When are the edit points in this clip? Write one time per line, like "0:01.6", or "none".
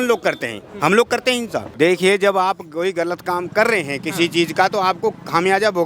0:01.6